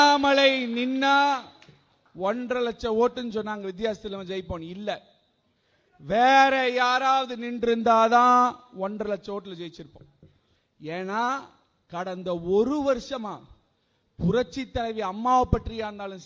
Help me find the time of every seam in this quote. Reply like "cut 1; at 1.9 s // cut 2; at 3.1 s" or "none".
none